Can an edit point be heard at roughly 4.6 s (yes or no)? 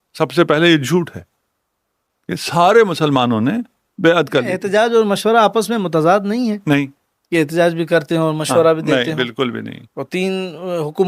yes